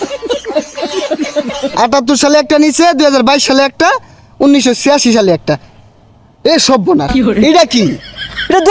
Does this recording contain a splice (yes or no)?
yes